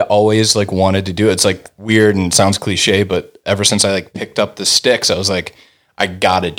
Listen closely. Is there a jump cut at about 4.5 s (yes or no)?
no